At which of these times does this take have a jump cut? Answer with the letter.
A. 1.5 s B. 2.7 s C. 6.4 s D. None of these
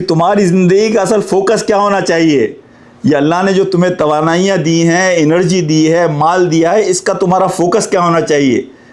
D